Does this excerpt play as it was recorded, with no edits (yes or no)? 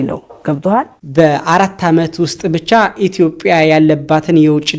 no